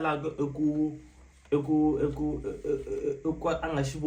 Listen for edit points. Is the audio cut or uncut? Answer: uncut